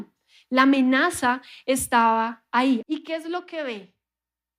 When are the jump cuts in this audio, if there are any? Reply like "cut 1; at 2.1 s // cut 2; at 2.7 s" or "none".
cut 1; at 2.8 s